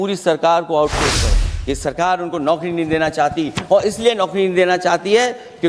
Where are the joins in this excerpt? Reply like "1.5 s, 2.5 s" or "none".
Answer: 1.5 s